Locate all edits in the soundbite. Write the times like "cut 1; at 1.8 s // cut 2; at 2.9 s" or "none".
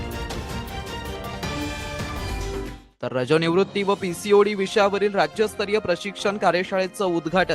none